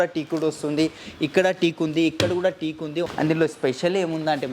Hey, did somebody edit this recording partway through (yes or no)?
yes